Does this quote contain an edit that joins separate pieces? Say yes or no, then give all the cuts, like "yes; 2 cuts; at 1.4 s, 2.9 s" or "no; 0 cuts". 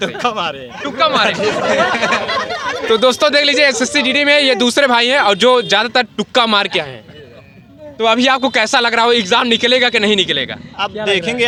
no; 0 cuts